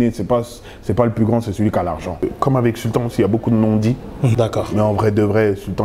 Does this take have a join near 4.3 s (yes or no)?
yes